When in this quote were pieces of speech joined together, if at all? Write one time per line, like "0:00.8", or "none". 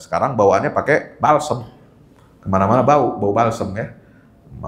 none